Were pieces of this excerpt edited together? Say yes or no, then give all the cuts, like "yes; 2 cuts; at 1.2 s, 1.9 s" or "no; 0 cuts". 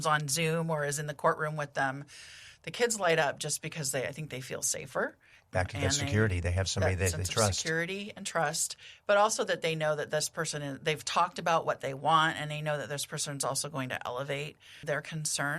no; 0 cuts